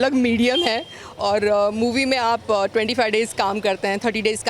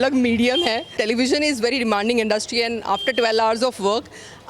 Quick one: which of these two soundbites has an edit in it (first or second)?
second